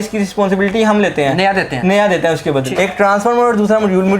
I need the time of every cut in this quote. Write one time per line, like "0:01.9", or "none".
0:02.6

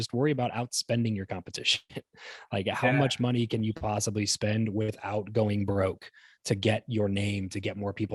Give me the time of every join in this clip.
none

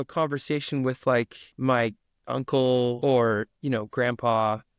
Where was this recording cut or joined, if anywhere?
0:01.4
0:03.0

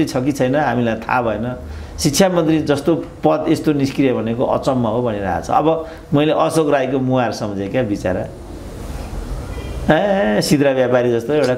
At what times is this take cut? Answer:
none

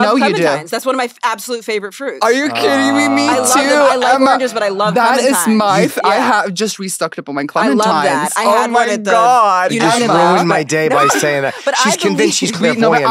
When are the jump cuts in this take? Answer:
none

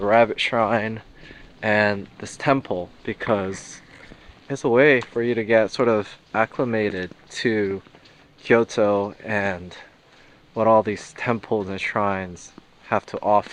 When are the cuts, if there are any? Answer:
none

